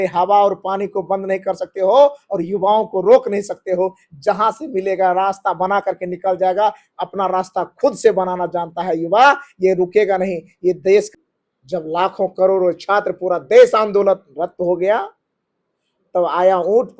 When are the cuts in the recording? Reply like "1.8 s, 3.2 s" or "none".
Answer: 11.1 s